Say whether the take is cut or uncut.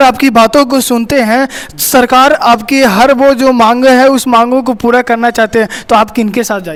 uncut